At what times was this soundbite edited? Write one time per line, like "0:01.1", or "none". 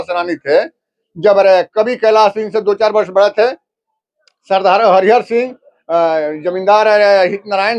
none